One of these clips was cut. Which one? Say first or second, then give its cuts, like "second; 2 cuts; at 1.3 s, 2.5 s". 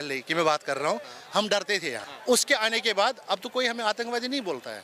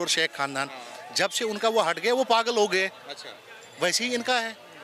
first; 1 cut; at 2.1 s